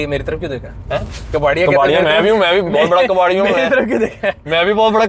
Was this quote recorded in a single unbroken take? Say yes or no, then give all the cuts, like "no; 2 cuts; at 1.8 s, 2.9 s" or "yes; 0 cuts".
yes; 0 cuts